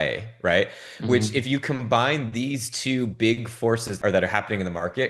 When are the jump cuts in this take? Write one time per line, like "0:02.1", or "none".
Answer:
0:03.9